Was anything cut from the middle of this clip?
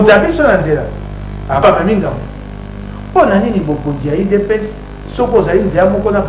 yes; 1 cut; at 1.6 s

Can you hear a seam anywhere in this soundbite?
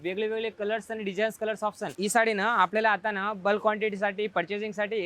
yes; 1 cut; at 1.9 s

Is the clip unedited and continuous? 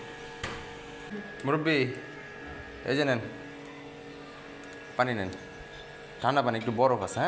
no; 1 cut; at 1.1 s

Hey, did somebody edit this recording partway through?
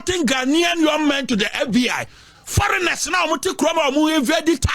no; 0 cuts

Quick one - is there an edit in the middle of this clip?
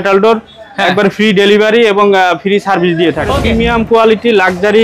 yes; 1 cut; at 3.4 s

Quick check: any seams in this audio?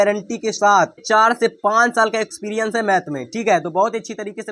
yes; 1 cut; at 1.0 s

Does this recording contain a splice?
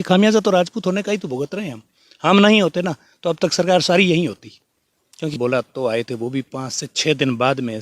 yes; 1 cut; at 5.3 s

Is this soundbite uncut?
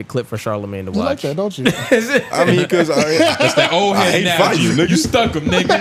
yes; 0 cuts

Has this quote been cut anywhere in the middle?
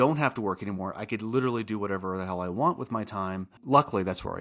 yes; 1 cut; at 3.5 s

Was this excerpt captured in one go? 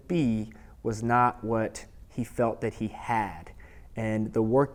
yes; 0 cuts

